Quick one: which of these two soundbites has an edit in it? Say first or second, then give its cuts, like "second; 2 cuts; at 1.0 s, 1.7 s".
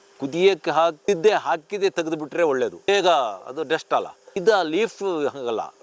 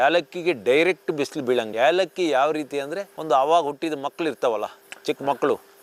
first; 3 cuts; at 1.0 s, 2.9 s, 4.2 s